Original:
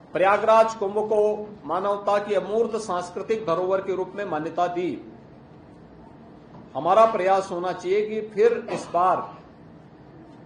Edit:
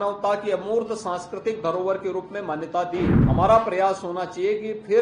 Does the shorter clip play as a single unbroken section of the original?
no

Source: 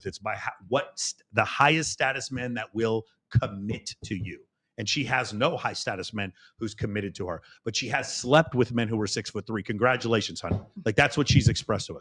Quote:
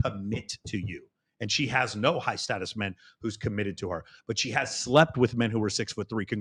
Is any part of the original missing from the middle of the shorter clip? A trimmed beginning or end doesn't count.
no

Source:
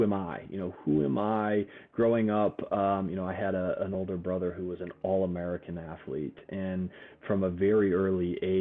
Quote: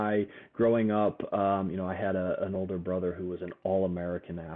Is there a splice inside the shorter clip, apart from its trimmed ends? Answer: no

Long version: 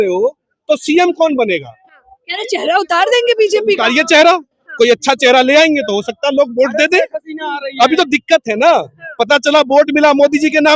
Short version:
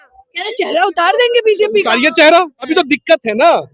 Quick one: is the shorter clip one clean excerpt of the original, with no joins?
no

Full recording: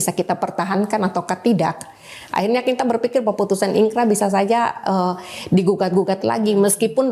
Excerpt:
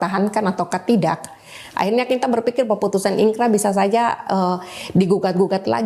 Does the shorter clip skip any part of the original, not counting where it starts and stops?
no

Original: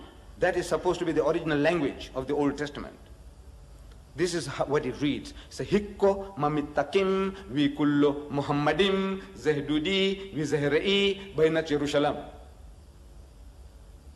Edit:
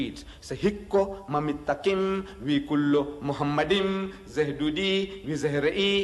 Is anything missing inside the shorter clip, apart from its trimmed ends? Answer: no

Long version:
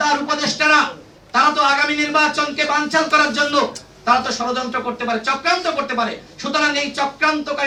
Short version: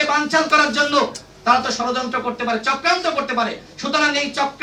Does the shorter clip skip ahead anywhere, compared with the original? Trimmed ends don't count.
no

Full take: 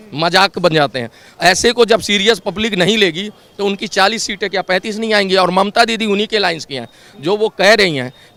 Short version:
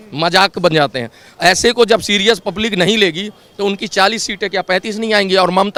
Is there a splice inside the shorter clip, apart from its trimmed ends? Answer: no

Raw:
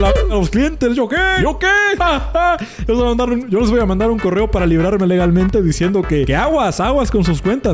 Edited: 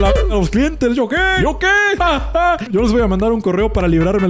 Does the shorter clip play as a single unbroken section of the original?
no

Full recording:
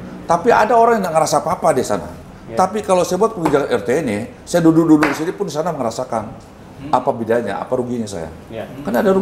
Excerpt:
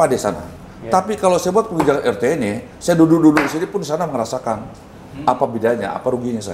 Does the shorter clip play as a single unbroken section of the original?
yes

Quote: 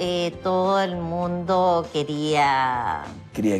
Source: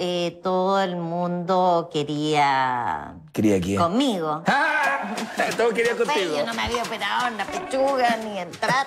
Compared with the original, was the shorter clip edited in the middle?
no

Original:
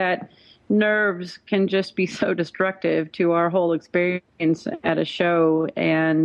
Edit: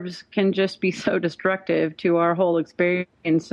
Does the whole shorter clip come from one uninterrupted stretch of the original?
yes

